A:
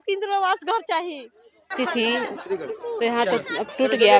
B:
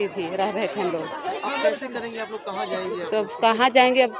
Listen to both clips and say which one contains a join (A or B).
A